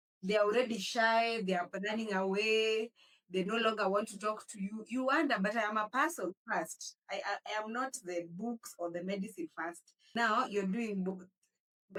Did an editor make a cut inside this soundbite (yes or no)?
no